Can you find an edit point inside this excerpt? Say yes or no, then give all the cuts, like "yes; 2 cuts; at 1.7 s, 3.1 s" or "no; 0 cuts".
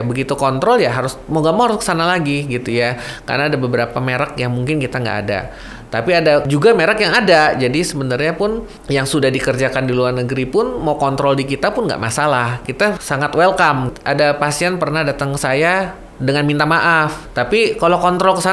yes; 5 cuts; at 6.5 s, 8.7 s, 12.8 s, 13.9 s, 17.2 s